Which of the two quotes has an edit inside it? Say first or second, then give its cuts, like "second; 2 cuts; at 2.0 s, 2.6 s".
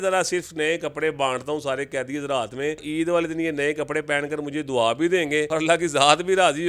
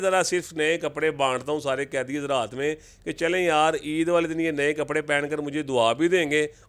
first; 2 cuts; at 2.8 s, 5.5 s